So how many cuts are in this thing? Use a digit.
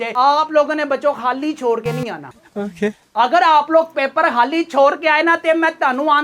0